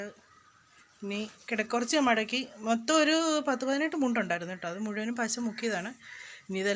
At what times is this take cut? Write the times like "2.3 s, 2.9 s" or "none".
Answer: none